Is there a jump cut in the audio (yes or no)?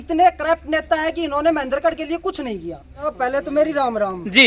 yes